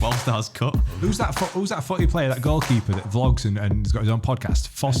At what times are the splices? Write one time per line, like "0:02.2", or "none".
0:00.9